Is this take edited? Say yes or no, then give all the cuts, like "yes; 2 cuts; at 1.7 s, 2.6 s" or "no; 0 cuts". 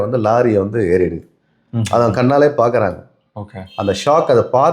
no; 0 cuts